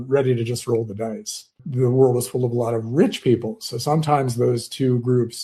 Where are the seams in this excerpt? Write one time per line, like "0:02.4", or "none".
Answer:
0:01.5